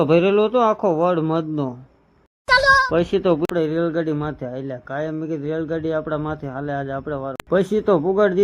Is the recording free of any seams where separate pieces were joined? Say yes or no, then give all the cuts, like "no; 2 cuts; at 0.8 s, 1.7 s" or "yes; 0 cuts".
no; 2 cuts; at 3.5 s, 7.4 s